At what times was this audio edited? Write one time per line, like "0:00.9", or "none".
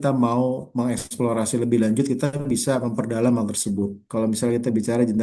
0:04.0